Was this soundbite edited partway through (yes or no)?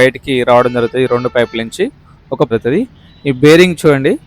yes